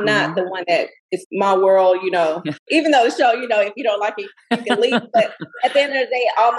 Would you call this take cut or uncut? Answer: cut